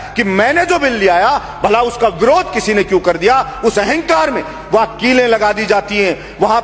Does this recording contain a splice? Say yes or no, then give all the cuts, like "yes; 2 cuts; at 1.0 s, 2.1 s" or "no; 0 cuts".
no; 0 cuts